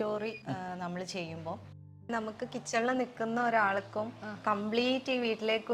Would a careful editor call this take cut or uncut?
cut